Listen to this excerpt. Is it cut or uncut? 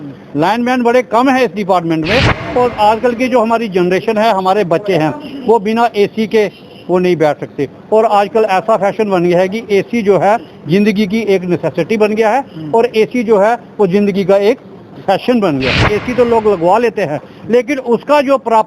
cut